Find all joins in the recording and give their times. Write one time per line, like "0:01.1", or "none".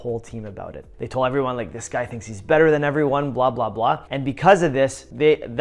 none